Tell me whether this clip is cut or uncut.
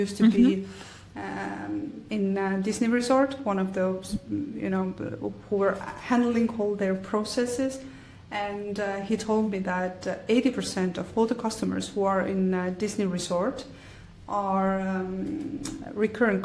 uncut